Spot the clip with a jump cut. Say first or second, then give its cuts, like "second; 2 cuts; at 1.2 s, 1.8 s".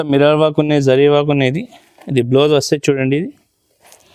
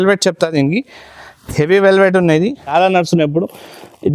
second; 1 cut; at 2.7 s